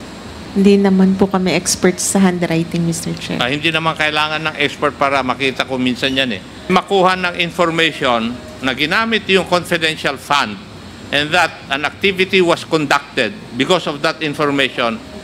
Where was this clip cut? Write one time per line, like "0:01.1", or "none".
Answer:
none